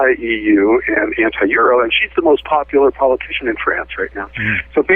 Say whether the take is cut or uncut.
uncut